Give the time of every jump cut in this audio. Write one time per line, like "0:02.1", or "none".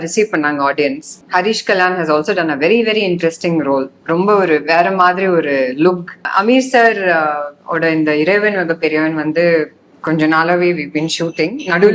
0:01.2
0:06.3